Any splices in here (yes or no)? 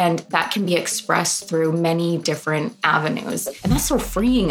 yes